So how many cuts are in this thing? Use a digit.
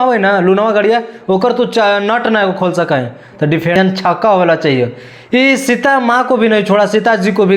1